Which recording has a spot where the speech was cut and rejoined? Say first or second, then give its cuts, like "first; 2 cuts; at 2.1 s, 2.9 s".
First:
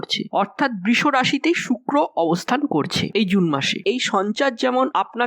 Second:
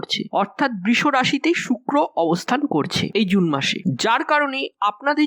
first; 1 cut; at 3.8 s